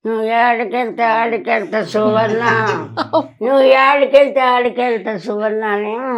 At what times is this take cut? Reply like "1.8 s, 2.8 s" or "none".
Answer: none